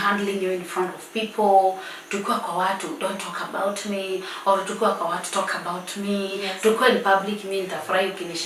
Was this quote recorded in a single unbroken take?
yes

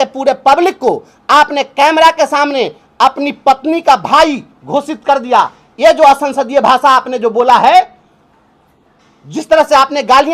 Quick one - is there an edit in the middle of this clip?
no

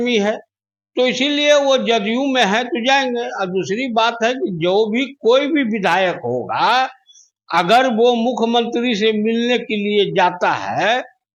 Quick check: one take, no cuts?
yes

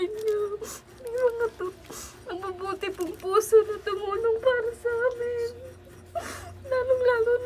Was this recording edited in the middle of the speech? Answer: no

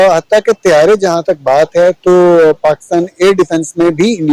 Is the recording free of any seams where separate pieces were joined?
yes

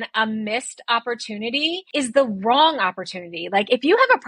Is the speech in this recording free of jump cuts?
no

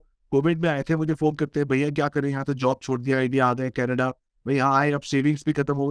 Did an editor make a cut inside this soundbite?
no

